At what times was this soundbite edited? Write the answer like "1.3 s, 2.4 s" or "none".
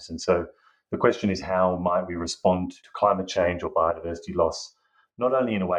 2.8 s

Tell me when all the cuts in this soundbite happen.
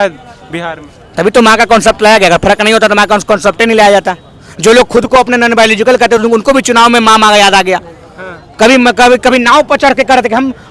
none

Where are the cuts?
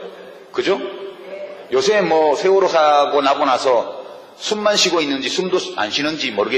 4.6 s

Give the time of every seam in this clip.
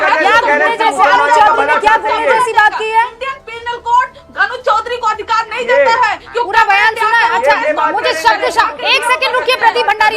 none

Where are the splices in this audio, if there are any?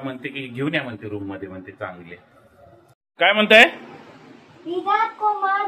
none

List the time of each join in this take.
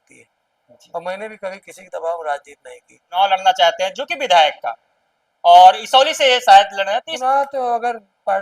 3.1 s, 7.1 s

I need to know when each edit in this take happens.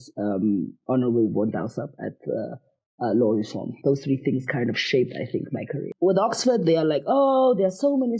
5.8 s

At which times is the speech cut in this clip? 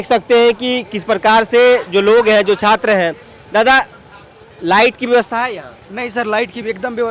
none

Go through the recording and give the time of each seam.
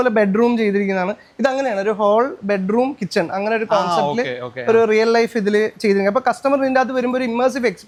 none

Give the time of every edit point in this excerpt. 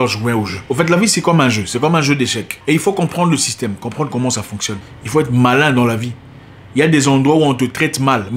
4.8 s

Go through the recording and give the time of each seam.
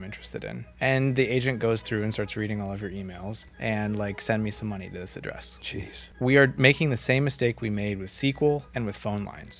3.5 s, 6.1 s

